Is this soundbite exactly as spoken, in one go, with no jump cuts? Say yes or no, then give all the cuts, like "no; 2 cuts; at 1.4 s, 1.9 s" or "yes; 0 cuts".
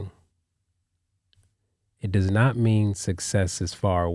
yes; 0 cuts